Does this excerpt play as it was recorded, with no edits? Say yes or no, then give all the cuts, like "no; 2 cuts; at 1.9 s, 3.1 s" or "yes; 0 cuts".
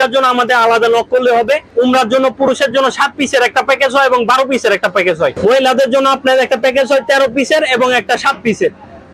yes; 0 cuts